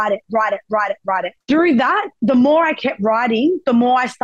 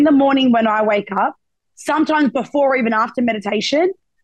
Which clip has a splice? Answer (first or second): first